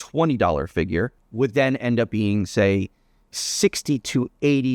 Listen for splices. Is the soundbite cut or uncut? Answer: cut